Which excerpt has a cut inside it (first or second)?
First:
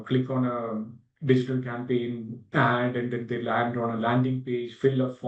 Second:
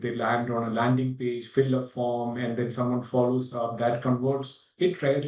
first